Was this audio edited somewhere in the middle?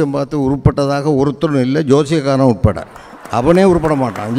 no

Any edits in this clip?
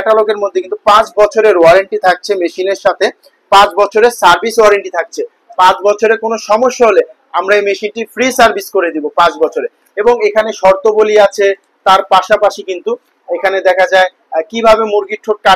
no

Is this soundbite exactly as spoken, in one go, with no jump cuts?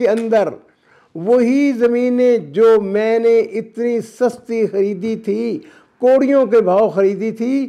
yes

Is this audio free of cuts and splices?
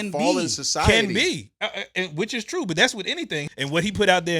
no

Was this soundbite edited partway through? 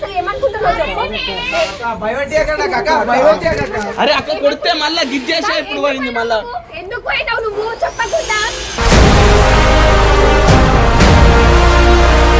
no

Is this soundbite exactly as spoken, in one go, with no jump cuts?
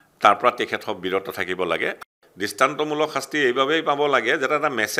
no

